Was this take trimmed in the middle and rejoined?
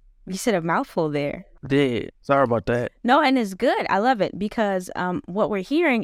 yes; 1 cut; at 1.5 s

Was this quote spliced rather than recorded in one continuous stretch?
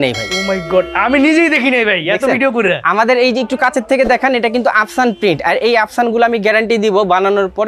no; 0 cuts

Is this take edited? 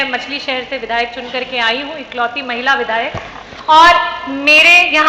no; 0 cuts

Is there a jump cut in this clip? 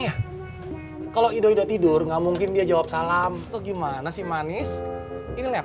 yes; 1 cut; at 3.4 s

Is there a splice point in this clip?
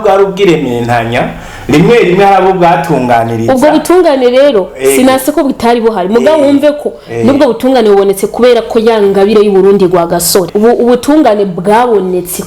yes; 1 cut; at 10.5 s

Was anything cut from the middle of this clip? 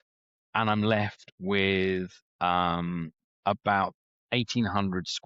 no; 0 cuts

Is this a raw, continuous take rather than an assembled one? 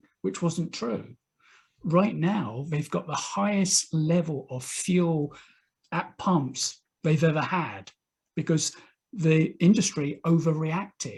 yes; 0 cuts

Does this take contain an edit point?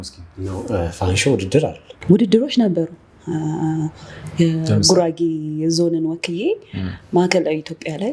yes; 1 cut; at 1.9 s

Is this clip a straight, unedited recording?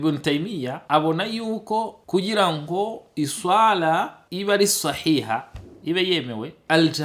yes; 0 cuts

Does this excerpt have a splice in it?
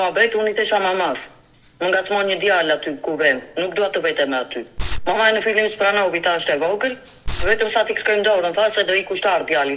yes; 2 cuts; at 4.9 s, 7.4 s

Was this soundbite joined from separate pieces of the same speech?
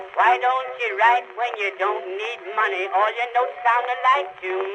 no; 0 cuts

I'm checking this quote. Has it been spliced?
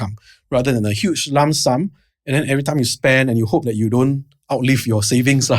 no; 0 cuts

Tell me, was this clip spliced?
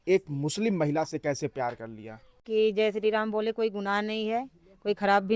yes; 1 cut; at 2.5 s

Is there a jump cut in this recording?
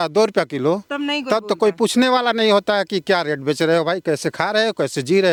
no; 0 cuts

